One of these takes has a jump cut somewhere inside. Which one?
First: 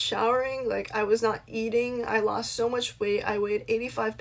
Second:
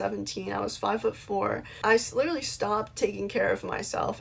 second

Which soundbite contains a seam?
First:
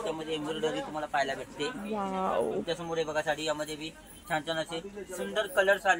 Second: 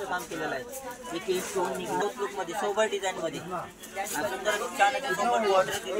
second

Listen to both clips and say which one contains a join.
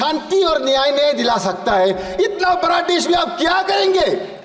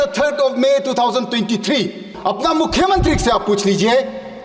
second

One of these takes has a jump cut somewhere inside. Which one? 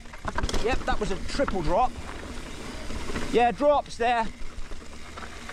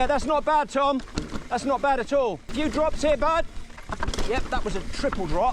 second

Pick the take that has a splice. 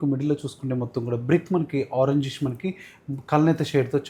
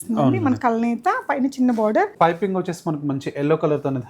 second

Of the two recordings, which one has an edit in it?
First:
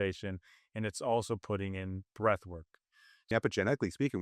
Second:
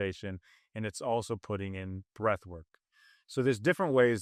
first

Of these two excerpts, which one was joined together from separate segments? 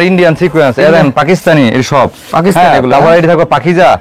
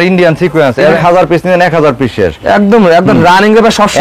second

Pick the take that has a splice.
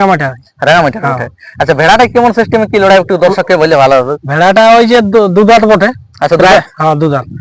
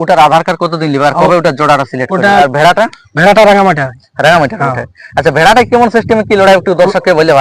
second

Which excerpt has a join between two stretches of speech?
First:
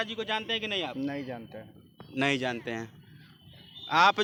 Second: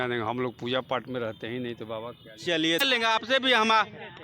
second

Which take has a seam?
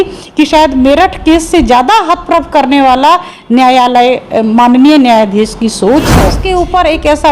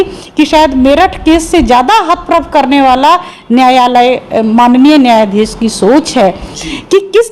first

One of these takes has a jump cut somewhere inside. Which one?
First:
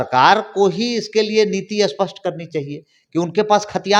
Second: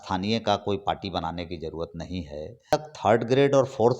second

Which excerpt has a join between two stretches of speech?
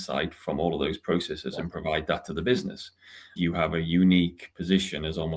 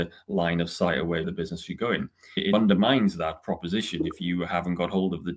first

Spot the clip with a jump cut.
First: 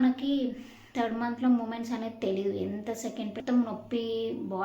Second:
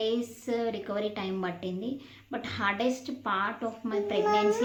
first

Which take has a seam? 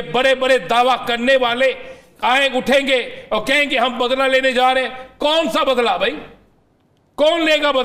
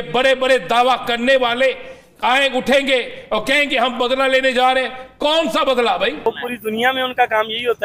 second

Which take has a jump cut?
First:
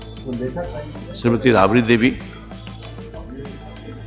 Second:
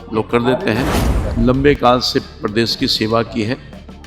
second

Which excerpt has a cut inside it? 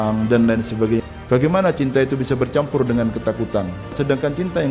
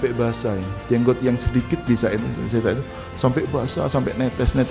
first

